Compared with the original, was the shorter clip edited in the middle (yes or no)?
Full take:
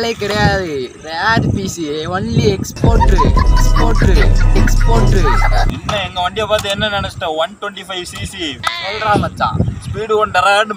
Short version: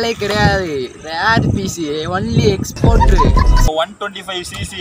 yes